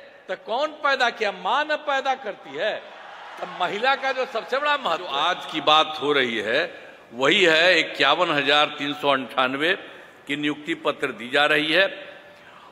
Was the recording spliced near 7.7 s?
no; 1 cut; at 5.2 s

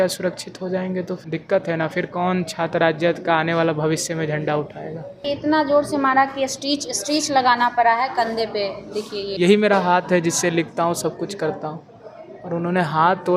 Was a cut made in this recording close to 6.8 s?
no; 3 cuts; at 1.2 s, 5.2 s, 9.3 s

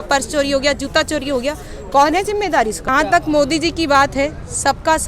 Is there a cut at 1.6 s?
no; 1 cut; at 2.8 s

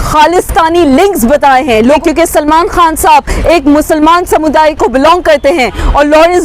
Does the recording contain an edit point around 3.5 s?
no; 1 cut; at 2.0 s

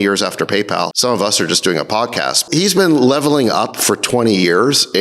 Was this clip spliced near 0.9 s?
yes; 2 cuts; at 0.9 s, 2.4 s

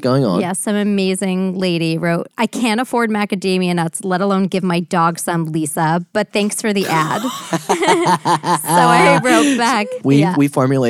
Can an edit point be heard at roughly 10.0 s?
yes; 1 cut; at 10.0 s

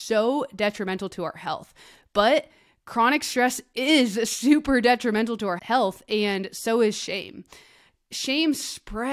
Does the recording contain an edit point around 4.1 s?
no; 1 cut; at 5.6 s

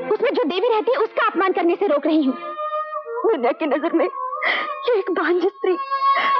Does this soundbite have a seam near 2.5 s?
yes; 1 cut; at 2.5 s

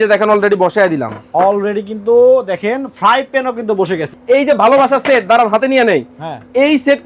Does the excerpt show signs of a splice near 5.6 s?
no; 1 cut; at 4.1 s

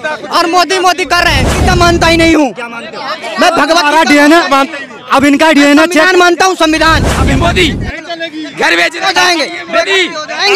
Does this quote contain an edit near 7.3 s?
yes; 2 cuts; at 1.5 s, 7.3 s

